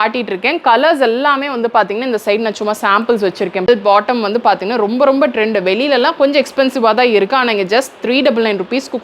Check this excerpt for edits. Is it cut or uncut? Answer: cut